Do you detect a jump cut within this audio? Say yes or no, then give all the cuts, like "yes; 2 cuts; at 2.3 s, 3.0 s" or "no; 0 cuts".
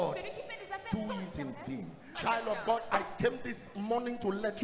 yes; 1 cut; at 2.1 s